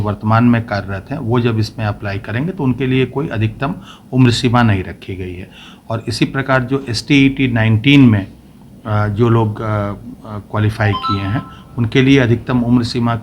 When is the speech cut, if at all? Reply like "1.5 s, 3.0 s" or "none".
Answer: none